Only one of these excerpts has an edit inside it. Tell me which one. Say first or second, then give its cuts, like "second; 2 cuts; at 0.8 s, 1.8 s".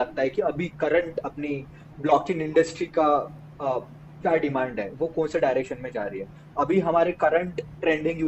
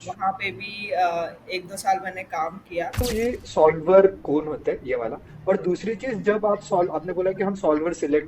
second; 1 cut; at 3.0 s